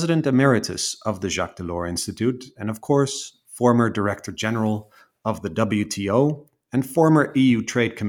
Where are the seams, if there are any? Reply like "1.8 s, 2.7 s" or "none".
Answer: none